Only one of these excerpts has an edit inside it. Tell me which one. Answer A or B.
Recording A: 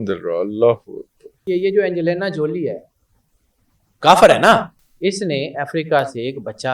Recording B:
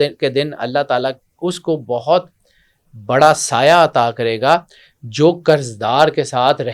A